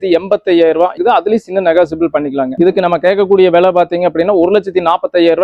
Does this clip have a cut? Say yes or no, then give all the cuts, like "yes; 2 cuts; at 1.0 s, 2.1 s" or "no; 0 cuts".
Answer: yes; 1 cut; at 2.5 s